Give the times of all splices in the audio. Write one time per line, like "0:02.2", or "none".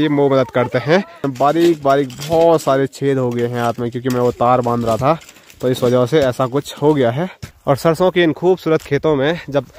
0:01.2
0:07.4